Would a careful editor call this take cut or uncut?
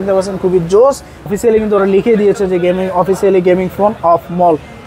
cut